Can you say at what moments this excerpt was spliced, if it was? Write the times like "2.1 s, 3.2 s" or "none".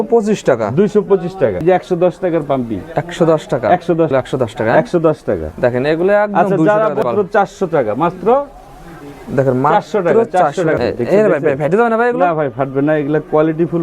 1.6 s, 4.1 s, 7.0 s, 10.8 s